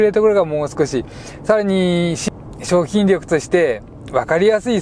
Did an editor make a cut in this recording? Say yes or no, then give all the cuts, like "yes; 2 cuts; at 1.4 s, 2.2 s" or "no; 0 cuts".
yes; 1 cut; at 2.2 s